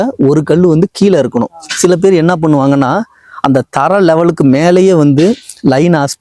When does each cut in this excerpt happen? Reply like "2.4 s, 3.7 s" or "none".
none